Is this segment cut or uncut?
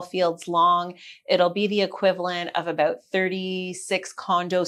uncut